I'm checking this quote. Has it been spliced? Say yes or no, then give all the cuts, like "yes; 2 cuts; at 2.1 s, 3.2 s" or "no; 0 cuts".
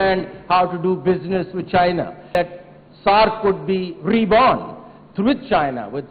yes; 1 cut; at 2.2 s